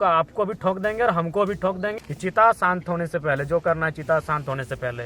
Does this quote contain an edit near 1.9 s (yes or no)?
yes